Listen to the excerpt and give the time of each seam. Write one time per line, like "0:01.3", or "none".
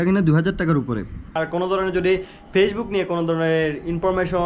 0:01.3